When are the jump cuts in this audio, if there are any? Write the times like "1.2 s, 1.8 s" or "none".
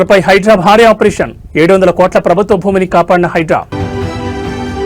3.7 s